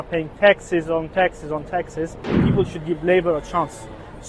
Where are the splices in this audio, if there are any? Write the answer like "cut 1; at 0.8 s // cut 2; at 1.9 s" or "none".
cut 1; at 2.4 s